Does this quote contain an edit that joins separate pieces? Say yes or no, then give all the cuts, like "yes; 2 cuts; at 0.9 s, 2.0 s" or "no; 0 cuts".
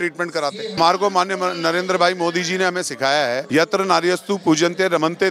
yes; 2 cuts; at 0.8 s, 3.4 s